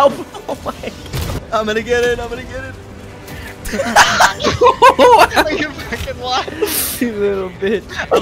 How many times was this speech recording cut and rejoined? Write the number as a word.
one